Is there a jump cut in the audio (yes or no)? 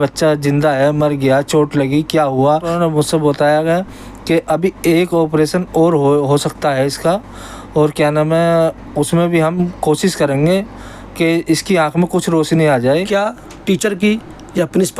yes